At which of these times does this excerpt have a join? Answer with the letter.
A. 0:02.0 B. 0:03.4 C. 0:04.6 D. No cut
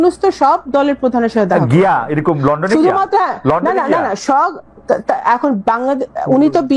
D